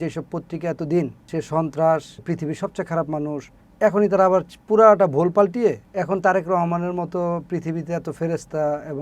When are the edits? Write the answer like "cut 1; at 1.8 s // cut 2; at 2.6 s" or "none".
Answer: cut 1; at 1.3 s // cut 2; at 2.2 s // cut 3; at 3.6 s // cut 4; at 5.9 s